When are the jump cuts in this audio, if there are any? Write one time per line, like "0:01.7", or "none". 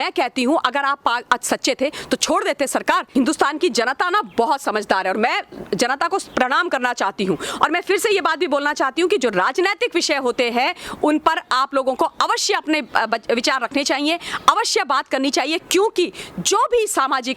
0:03.1